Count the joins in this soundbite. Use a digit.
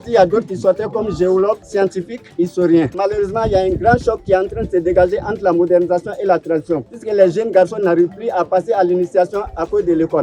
3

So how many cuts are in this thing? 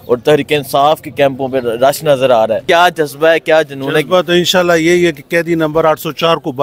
1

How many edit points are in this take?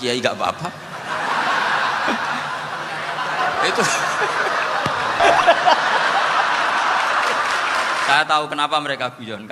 1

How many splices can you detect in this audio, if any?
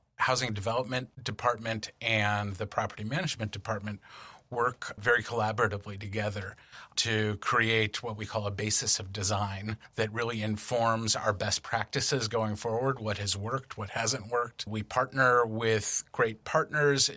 3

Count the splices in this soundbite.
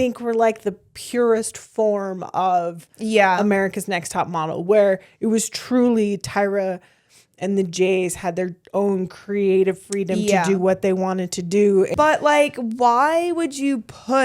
1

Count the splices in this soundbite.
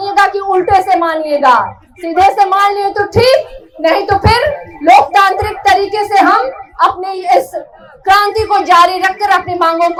0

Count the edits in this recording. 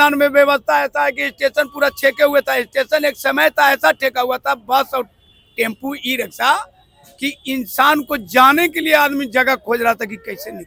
0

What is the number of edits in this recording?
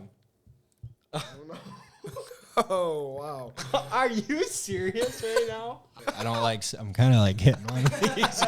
1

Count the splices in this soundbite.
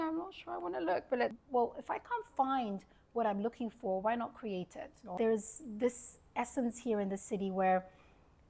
2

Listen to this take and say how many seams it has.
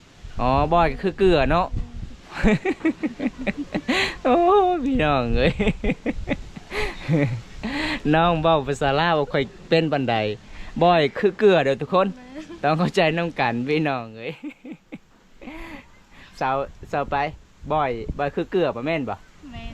0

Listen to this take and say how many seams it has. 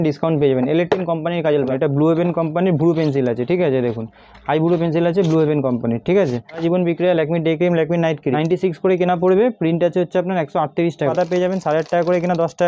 4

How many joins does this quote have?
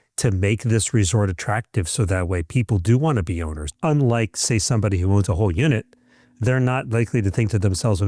1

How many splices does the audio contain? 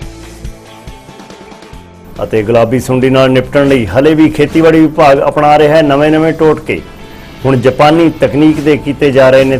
1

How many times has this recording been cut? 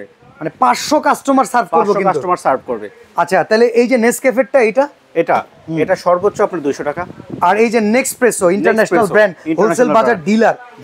0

